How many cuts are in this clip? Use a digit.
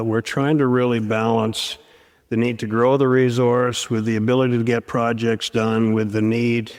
0